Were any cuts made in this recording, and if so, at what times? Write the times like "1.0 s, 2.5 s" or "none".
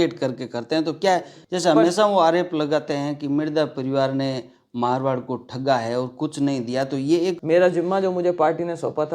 1.4 s, 7.4 s